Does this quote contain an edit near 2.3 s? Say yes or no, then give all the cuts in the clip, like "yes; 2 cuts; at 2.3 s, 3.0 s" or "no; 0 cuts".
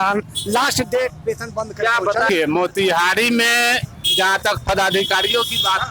yes; 1 cut; at 2.3 s